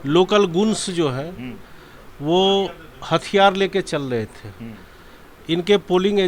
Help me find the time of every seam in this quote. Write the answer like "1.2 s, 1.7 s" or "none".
none